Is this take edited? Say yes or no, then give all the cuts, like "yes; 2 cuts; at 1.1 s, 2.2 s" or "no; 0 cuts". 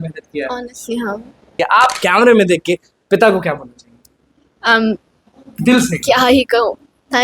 yes; 1 cut; at 1.5 s